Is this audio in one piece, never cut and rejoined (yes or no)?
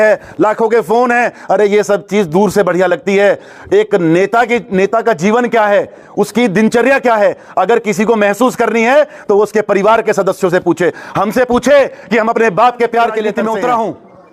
no